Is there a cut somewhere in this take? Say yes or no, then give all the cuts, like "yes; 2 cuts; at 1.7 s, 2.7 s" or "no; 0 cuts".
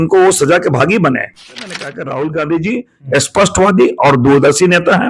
yes; 1 cut; at 1.6 s